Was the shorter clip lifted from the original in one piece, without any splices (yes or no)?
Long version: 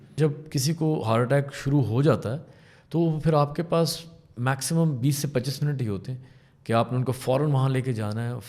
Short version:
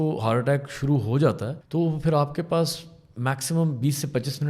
no